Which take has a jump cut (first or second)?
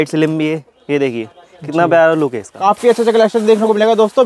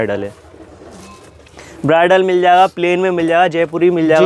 first